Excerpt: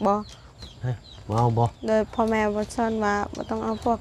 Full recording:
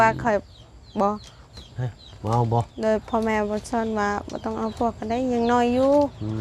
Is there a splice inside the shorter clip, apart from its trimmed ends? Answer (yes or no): no